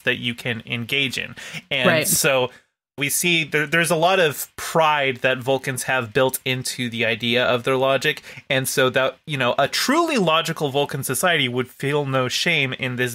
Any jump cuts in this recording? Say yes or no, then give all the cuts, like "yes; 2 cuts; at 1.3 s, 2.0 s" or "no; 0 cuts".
yes; 1 cut; at 3.0 s